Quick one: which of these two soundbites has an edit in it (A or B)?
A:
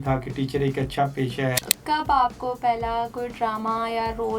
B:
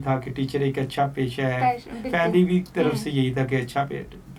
A